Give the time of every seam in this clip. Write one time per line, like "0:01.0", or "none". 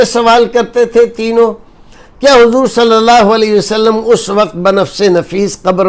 none

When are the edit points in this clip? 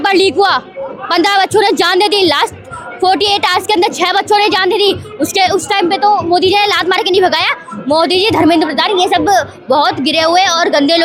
none

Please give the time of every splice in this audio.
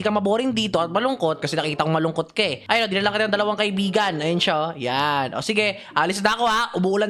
none

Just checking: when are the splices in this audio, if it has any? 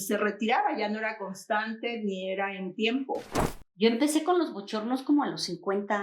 0:03.4

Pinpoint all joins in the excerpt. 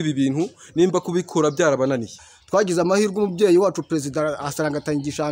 0:02.1

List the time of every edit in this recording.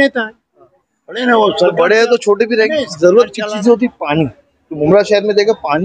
0:02.9

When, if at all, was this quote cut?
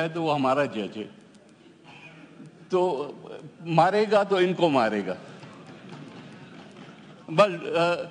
none

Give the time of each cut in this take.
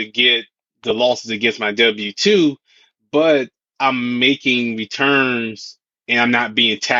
none

